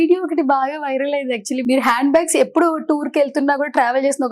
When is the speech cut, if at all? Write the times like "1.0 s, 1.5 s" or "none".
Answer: 1.6 s